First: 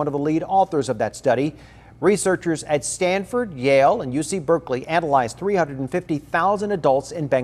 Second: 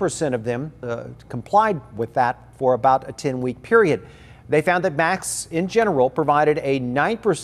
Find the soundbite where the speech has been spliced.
second; 1 cut; at 0.9 s

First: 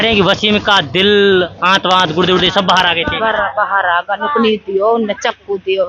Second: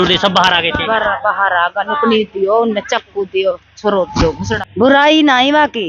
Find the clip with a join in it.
second; 1 cut; at 4.5 s

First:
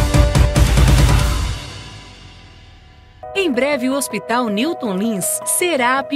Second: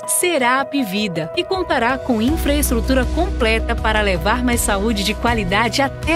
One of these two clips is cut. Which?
first; 1 cut; at 3.2 s

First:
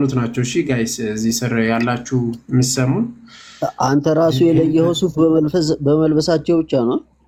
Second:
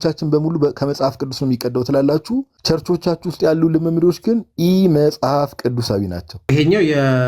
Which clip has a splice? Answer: second; 2 cuts; at 2.5 s, 6.3 s

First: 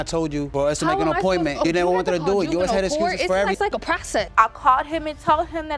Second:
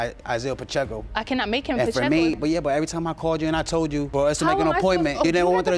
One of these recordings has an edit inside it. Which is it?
first; 1 cut; at 4.3 s

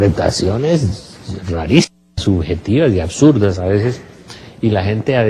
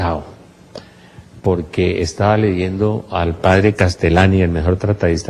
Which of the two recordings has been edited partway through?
first; 1 cut; at 3.1 s

